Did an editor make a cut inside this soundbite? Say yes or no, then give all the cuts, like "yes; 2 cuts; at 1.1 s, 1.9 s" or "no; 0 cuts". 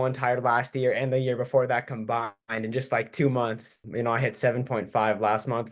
yes; 1 cut; at 3.8 s